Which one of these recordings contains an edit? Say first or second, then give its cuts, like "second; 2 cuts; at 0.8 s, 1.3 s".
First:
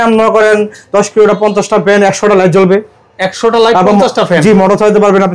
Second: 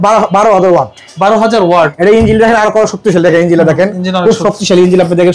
second; 1 cut; at 1.9 s